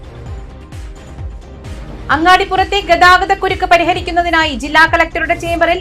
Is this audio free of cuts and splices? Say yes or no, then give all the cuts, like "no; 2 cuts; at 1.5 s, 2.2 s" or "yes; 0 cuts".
no; 1 cut; at 1.3 s